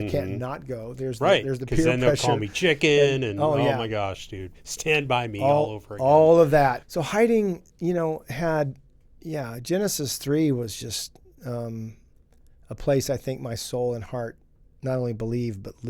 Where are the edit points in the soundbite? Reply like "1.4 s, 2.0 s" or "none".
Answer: 6.8 s

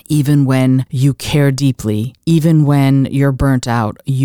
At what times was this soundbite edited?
0.9 s, 2.1 s

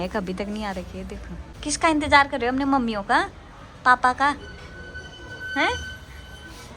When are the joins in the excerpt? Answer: none

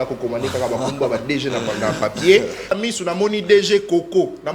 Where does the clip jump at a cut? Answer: 2.7 s

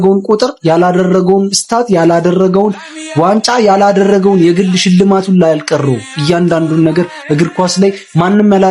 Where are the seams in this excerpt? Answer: none

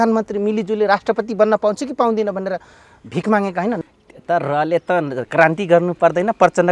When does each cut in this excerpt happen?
3.8 s

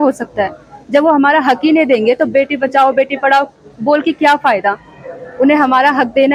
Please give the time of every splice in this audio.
none

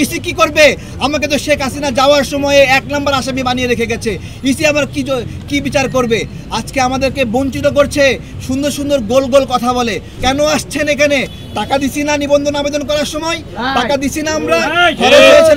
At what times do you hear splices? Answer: 10.1 s

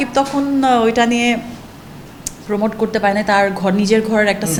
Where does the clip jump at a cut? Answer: none

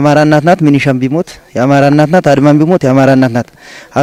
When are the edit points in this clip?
none

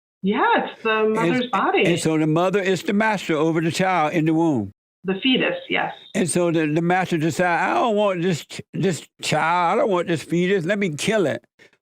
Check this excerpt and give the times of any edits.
4.8 s

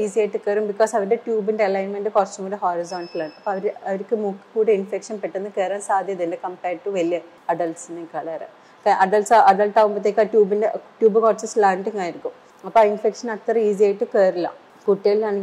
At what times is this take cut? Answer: none

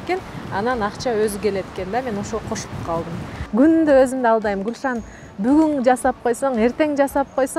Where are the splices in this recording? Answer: 3.3 s

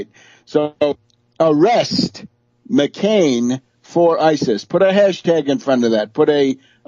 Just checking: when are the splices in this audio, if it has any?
2.6 s

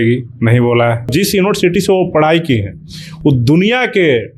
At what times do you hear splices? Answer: 1.1 s

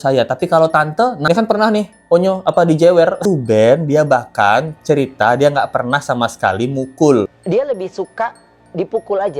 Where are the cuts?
1.2 s, 3.2 s, 7.4 s

